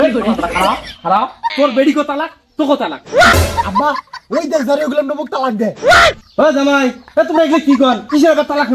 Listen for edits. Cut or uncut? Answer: cut